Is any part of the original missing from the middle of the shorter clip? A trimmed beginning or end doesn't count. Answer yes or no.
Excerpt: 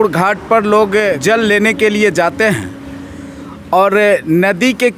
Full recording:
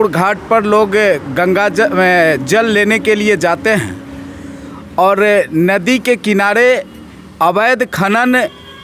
yes